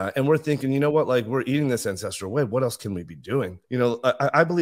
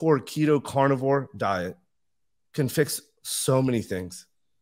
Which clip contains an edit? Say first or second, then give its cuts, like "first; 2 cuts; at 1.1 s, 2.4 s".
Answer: first; 1 cut; at 3.6 s